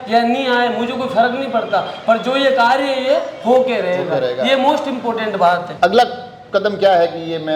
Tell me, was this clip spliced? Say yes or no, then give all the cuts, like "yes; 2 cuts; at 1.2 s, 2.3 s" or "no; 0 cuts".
yes; 1 cut; at 5.7 s